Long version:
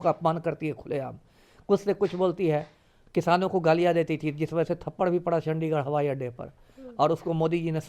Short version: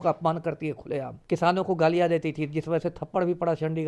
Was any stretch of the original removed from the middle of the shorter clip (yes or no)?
yes